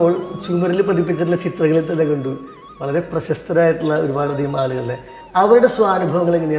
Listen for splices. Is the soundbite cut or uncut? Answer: cut